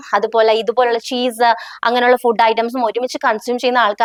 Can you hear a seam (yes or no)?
no